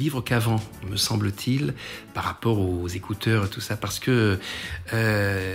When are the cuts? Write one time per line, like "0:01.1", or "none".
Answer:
none